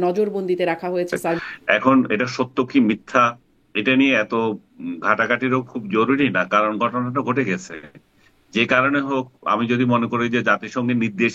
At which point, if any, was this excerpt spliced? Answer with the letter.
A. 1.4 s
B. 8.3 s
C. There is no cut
A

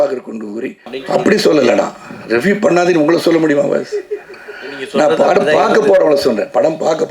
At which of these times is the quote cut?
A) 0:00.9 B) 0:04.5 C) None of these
A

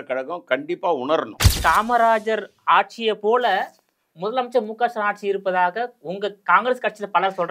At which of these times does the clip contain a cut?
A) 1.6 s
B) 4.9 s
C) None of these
A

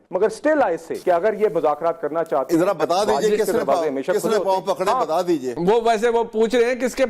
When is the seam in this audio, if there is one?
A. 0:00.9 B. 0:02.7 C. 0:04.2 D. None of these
A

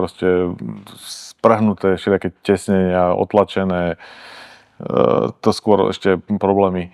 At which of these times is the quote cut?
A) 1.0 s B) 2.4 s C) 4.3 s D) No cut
D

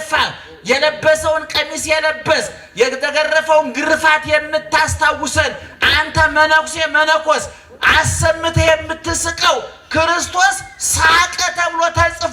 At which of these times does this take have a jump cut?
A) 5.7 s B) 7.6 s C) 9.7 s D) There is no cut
D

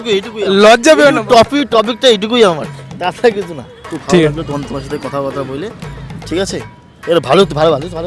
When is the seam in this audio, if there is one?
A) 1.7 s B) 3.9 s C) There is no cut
B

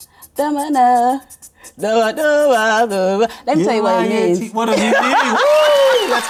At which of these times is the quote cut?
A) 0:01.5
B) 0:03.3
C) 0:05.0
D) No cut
D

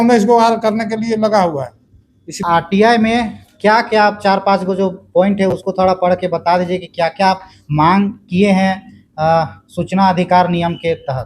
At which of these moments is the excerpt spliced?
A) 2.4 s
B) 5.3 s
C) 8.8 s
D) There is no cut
A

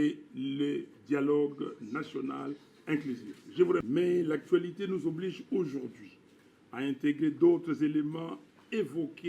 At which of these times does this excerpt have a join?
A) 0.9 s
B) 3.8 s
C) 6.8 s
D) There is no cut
B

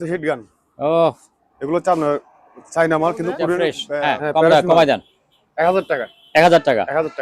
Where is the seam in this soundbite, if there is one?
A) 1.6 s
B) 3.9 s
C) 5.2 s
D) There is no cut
B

